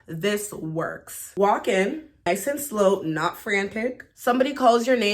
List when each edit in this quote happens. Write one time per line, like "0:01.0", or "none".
0:01.1
0:02.3
0:04.1